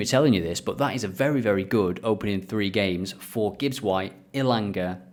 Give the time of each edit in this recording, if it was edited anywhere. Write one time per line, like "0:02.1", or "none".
none